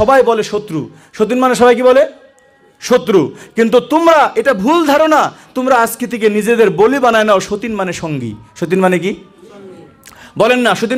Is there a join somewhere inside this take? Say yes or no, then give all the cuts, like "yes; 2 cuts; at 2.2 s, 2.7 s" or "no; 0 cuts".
no; 0 cuts